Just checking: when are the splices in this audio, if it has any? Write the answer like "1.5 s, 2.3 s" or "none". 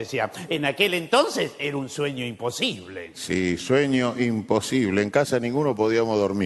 none